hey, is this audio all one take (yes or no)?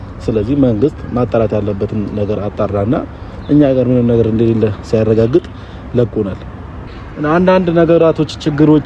no